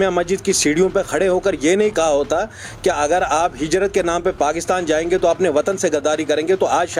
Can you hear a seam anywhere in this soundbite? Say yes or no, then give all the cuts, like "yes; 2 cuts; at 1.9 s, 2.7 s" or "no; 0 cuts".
no; 0 cuts